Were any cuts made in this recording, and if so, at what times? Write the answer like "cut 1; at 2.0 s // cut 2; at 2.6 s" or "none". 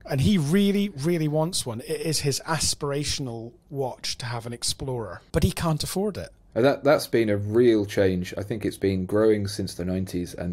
cut 1; at 5.2 s // cut 2; at 6.3 s